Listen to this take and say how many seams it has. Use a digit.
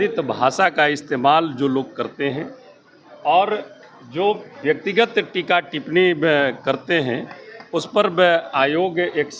0